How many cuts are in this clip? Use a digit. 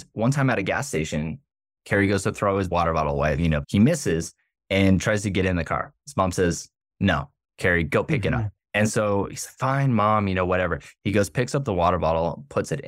2